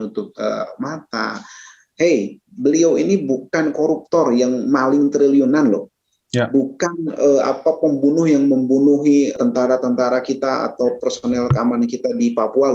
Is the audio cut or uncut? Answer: cut